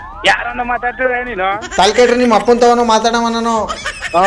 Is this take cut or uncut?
uncut